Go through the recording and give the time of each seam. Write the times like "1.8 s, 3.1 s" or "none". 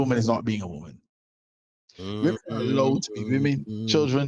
none